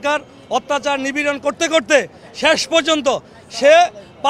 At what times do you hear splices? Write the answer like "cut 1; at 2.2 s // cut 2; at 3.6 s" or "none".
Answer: none